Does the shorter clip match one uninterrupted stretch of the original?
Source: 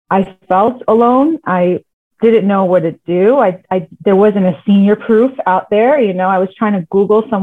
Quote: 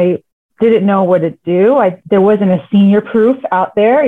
no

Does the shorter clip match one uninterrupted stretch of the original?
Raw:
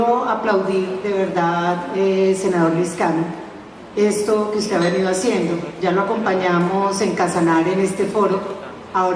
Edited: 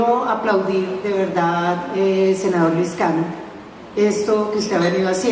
yes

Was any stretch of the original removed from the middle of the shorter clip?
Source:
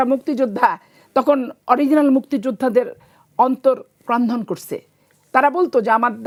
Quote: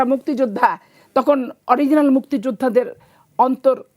no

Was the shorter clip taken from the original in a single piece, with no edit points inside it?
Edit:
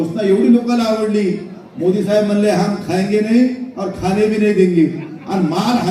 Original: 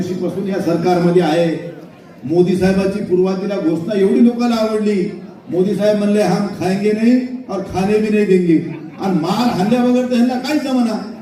yes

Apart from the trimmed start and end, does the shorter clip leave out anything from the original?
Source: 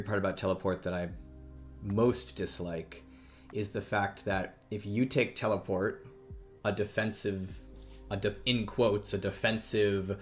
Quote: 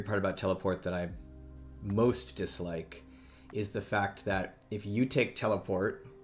no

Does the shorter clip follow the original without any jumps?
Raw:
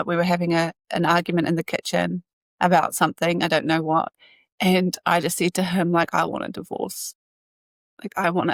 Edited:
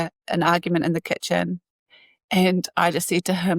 no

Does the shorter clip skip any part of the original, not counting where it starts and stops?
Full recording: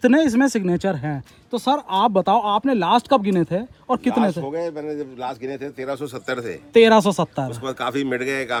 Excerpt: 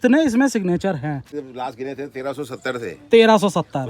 yes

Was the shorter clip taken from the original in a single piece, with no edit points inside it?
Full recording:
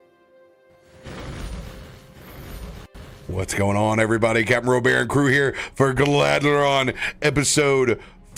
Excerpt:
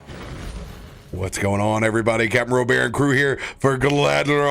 no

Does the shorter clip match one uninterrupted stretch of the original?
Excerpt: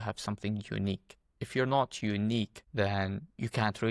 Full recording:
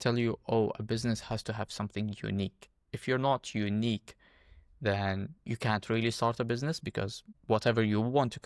no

